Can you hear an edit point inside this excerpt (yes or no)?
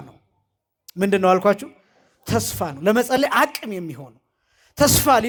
no